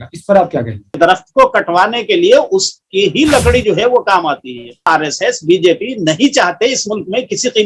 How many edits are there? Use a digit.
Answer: 2